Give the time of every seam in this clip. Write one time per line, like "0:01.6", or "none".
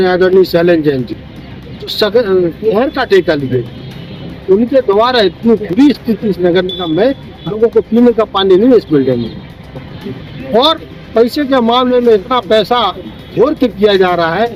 none